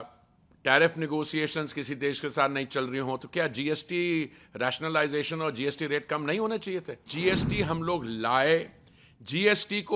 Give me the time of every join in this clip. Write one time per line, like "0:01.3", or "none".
0:07.1